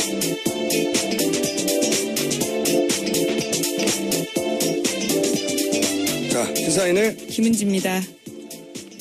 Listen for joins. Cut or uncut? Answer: cut